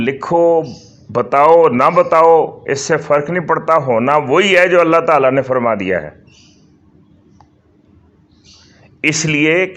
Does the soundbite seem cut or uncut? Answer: uncut